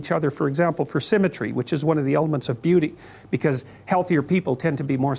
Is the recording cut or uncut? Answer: cut